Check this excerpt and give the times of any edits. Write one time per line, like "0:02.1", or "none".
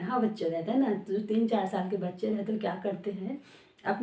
none